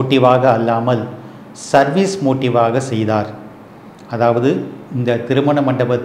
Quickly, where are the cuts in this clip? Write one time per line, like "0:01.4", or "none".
none